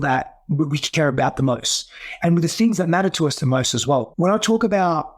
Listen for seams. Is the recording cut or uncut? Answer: cut